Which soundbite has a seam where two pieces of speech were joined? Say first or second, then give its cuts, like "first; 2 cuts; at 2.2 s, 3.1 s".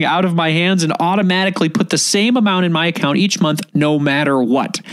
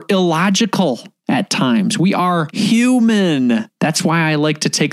second; 3 cuts; at 1.1 s, 2.5 s, 3.7 s